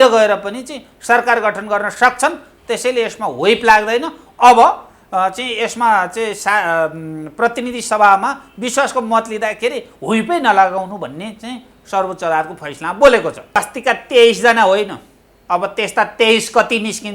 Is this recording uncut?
no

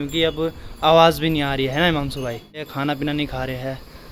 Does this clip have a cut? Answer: yes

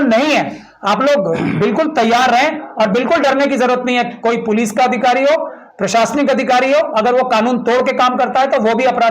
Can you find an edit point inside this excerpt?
no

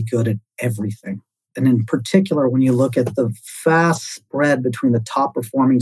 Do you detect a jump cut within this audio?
no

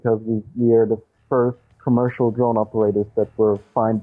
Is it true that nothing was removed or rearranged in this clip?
no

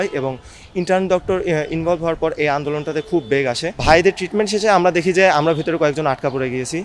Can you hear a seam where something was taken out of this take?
yes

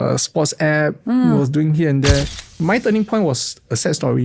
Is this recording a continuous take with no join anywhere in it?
no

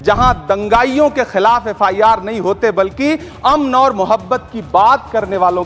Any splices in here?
no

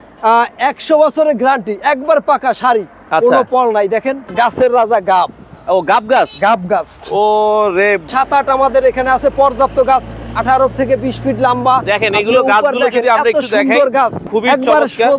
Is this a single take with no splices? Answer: no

